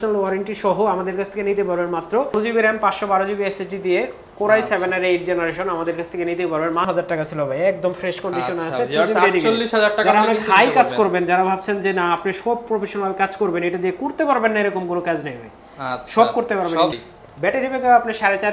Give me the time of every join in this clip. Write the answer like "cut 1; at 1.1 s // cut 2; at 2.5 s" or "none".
cut 1; at 2.4 s // cut 2; at 6.9 s // cut 3; at 16.9 s